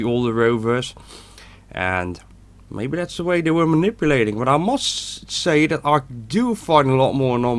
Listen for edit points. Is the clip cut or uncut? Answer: uncut